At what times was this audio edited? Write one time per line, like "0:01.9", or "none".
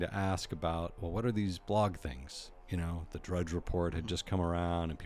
none